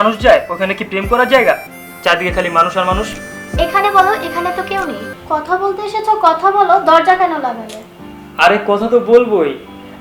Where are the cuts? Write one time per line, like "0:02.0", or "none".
0:05.1